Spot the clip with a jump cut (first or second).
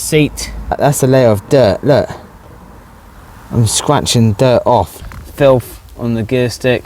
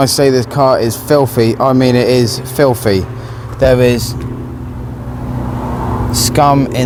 first